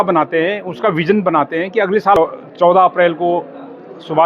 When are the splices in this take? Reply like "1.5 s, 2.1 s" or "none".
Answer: 2.2 s